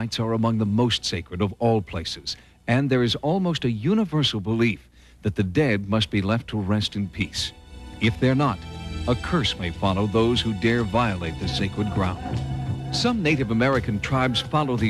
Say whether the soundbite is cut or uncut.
uncut